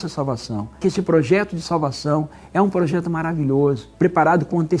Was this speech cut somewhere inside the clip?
yes; 2 cuts; at 0.8 s, 3.9 s

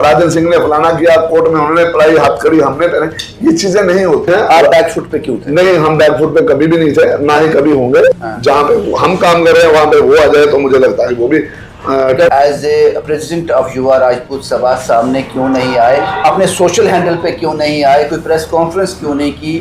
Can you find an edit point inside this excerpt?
yes; 3 cuts; at 4.3 s, 8.3 s, 12.3 s

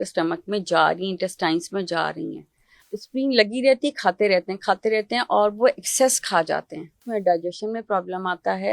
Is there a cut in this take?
yes; 2 cuts; at 2.8 s, 7.0 s

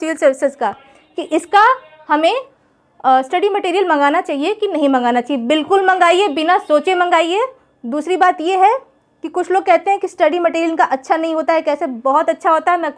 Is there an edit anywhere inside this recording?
no; 0 cuts

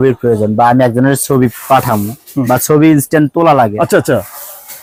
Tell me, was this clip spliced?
no; 0 cuts

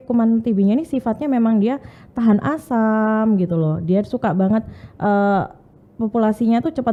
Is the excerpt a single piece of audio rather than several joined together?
yes; 0 cuts

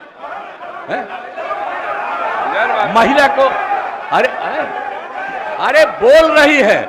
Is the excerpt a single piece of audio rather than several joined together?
yes; 0 cuts

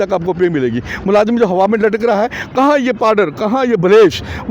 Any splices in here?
yes; 1 cut; at 2.4 s

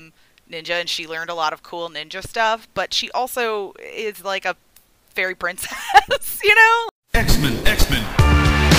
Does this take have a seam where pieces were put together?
yes; 1 cut; at 6.9 s

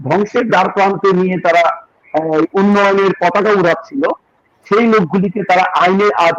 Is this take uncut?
yes; 0 cuts

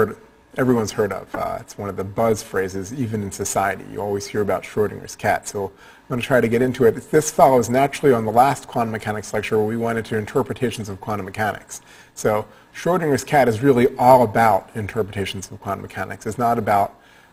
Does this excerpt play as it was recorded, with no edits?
yes; 0 cuts

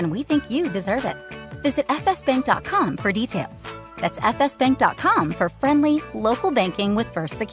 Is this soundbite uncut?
yes; 0 cuts

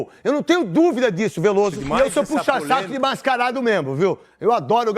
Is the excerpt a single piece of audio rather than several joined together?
no; 1 cut; at 1.8 s

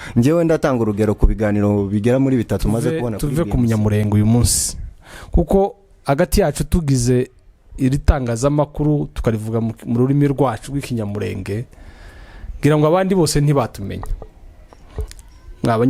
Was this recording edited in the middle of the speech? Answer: yes; 1 cut; at 3.0 s

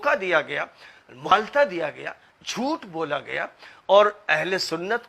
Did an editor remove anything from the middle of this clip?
yes; 1 cut; at 1.3 s

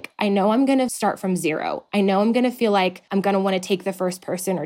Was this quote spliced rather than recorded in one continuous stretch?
yes; 2 cuts; at 0.9 s, 3.0 s

